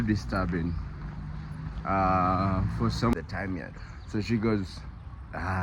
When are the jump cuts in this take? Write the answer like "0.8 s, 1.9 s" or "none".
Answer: 3.1 s